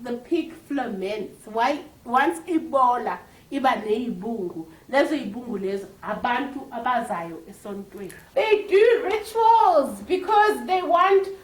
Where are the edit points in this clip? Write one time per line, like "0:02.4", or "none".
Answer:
0:08.2